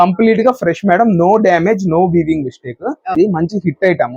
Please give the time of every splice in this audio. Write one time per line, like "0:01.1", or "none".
0:03.1

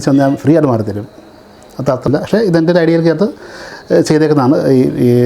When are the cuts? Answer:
0:02.1

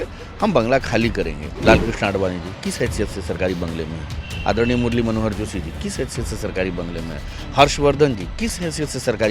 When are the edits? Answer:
0:01.4

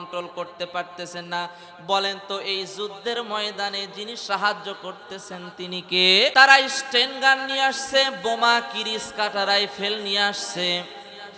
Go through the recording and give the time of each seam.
0:06.3

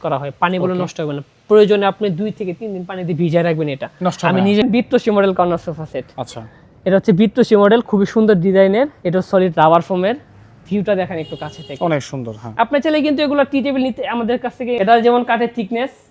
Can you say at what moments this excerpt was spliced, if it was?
0:04.6
0:14.8

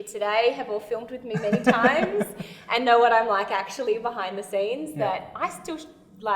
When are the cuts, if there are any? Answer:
none

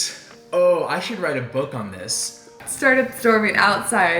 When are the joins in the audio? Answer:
0:02.6

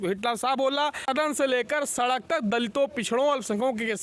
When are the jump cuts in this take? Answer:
0:01.1

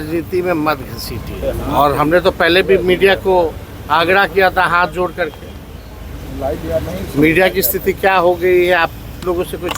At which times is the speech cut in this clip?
0:01.4

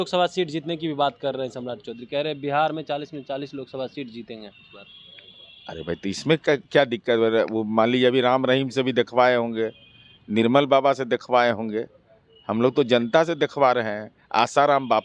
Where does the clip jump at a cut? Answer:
none

